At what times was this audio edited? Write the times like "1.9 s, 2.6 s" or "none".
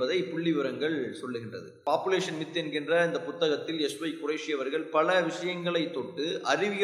1.8 s